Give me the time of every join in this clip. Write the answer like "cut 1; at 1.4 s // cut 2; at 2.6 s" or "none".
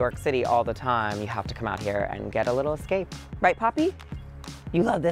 cut 1; at 3.2 s